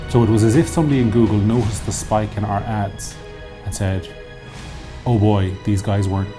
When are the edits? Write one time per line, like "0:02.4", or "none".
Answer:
none